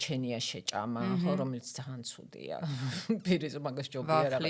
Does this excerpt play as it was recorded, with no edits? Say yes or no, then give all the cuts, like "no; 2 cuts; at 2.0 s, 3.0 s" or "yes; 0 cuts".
yes; 0 cuts